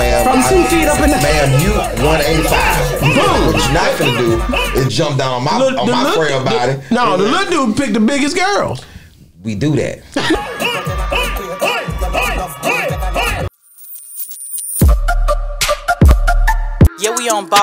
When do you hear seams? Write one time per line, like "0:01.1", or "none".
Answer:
0:13.5